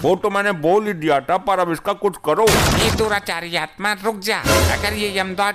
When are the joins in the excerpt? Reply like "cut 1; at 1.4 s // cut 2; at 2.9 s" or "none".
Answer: none